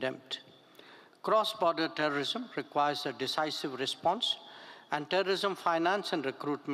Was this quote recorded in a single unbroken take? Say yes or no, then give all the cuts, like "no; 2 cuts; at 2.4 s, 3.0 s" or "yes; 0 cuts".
yes; 0 cuts